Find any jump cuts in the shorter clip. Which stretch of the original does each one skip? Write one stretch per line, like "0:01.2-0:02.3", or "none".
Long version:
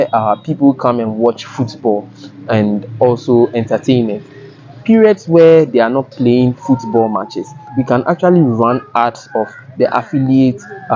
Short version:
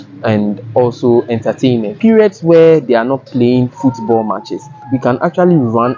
0:04.2-0:04.8